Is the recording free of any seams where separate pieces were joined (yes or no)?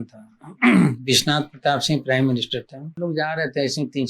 no